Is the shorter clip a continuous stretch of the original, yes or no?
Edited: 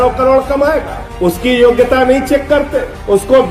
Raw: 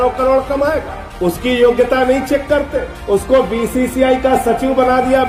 yes